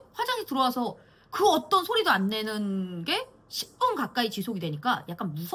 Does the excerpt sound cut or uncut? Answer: uncut